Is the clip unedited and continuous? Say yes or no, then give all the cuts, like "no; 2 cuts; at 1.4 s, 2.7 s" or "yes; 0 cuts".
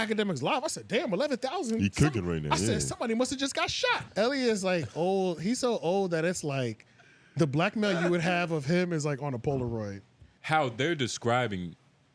no; 2 cuts; at 4.0 s, 10.3 s